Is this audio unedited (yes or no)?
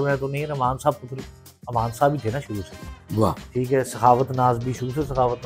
yes